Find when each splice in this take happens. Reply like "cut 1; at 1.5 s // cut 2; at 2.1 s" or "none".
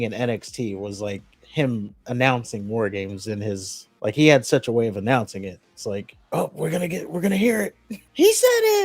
none